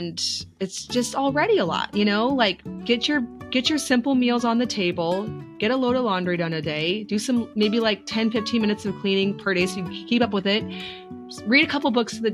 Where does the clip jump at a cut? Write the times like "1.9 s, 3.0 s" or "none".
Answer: none

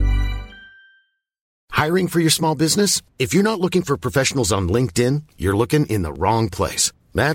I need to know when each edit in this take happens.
1.5 s

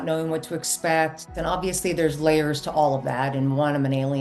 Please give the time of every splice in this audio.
1.3 s

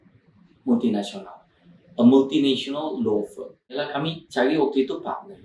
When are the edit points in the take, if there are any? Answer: 3.9 s

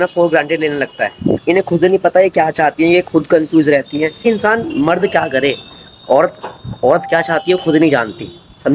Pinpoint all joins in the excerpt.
1.4 s, 4.2 s

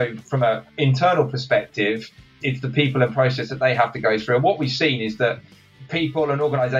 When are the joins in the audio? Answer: 0.8 s, 2.3 s, 5.7 s

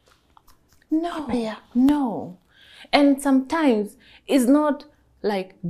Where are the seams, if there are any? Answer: none

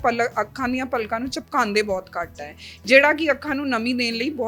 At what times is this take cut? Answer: none

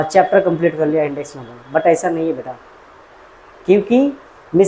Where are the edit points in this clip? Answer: none

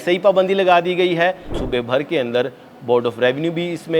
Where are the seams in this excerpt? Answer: 1.6 s

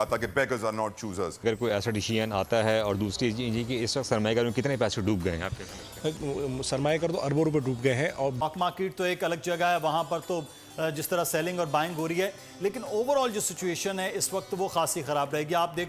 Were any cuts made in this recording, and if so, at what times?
1.4 s, 8.4 s

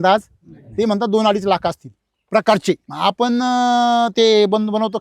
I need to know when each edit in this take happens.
2.9 s

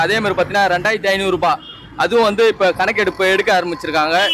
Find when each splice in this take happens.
none

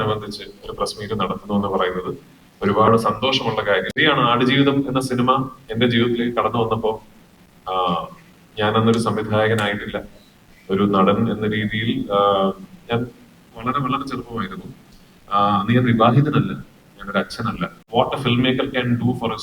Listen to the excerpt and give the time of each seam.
4.0 s, 17.8 s

